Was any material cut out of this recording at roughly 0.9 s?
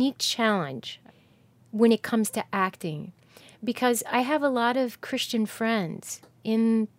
yes; 1 cut; at 0.9 s

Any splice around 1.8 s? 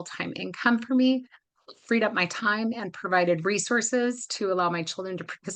no; 0 cuts

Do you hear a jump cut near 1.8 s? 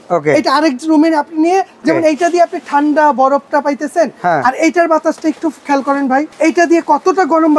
yes; 2 cuts; at 1.8 s, 6.3 s

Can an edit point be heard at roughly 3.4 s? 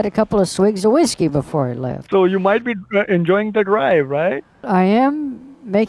no; 2 cuts; at 1.9 s, 4.7 s

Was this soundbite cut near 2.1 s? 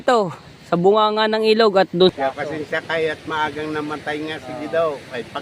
yes; 1 cut; at 2.1 s

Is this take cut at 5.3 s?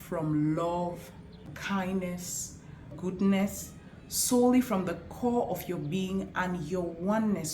no; 2 cuts; at 1.6 s, 2.9 s

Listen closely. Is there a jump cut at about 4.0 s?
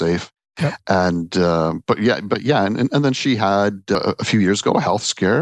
yes; 1 cut; at 4.0 s

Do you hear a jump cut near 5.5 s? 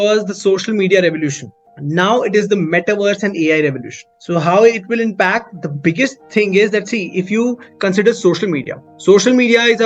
no; 0 cuts

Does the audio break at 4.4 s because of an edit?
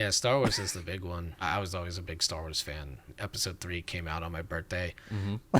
no; 2 cuts; at 1.4 s, 3.1 s

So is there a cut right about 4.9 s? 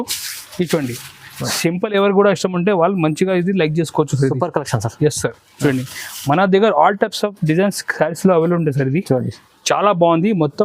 no; 0 cuts

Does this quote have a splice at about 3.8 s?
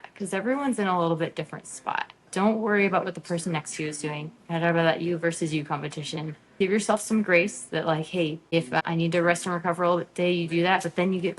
no; 3 cuts; at 2.2 s, 6.5 s, 8.7 s

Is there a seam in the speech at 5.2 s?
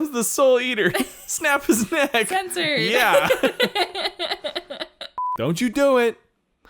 yes; 1 cut; at 5.2 s

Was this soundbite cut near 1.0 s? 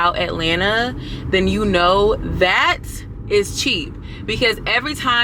no; 0 cuts

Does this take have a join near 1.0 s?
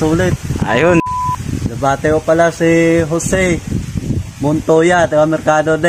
yes; 1 cut; at 1.0 s

